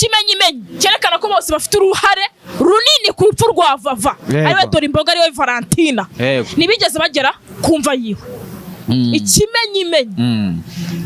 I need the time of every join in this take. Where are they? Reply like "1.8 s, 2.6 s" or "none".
none